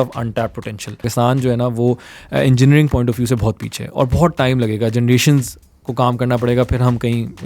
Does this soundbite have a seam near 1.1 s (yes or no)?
yes